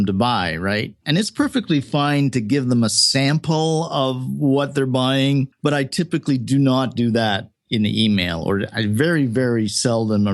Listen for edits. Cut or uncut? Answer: uncut